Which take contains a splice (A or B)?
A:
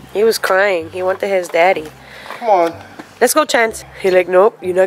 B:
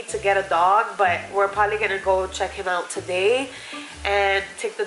A